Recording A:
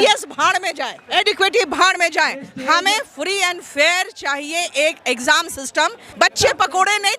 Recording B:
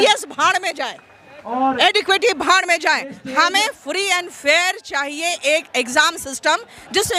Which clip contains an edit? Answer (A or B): A